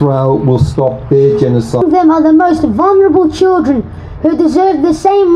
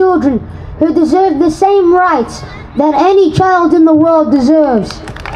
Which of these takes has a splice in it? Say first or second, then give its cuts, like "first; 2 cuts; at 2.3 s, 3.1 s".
first; 1 cut; at 1.8 s